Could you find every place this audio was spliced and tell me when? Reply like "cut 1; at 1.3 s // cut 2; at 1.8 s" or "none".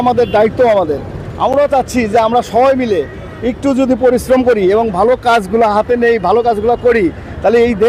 none

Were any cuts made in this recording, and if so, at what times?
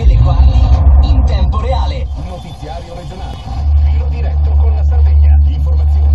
cut 1; at 2.1 s

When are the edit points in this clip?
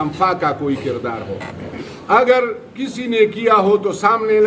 cut 1; at 1.6 s

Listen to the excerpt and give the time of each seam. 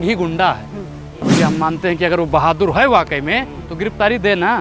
cut 1; at 1.3 s

